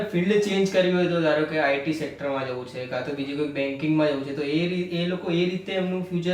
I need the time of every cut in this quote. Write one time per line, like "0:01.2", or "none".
none